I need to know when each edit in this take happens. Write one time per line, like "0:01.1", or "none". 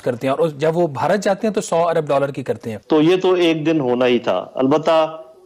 0:02.7